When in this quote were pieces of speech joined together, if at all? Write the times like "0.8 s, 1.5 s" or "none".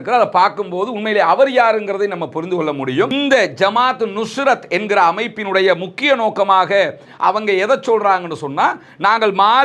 3.1 s